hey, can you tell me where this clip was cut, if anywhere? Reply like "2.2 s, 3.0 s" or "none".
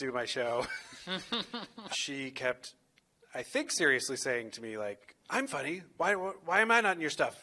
1.9 s